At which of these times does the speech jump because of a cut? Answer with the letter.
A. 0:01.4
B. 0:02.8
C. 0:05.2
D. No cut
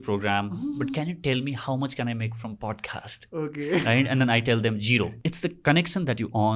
C